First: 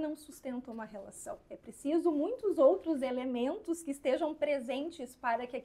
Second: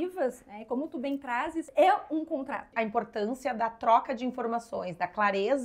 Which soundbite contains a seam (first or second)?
second